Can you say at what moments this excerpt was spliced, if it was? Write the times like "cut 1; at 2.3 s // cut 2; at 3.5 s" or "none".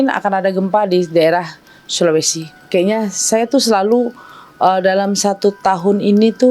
none